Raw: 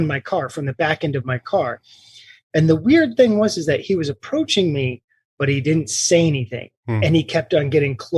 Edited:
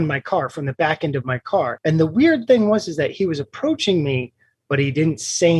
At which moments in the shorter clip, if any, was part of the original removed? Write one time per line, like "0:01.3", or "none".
0:01.8